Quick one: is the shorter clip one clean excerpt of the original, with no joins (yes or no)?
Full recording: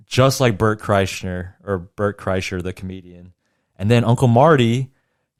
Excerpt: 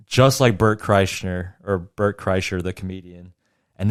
yes